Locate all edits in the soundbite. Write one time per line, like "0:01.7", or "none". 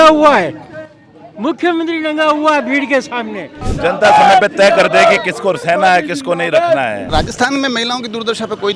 0:03.6
0:07.1